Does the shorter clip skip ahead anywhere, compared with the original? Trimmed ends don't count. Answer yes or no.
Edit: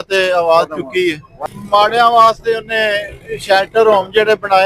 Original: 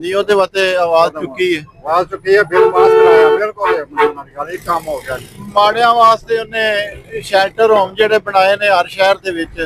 yes